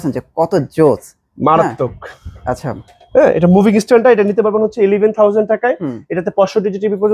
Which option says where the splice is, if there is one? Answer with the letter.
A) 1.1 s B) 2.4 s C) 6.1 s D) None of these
D